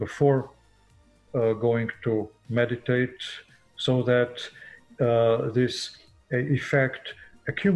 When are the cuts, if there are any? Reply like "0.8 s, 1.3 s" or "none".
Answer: none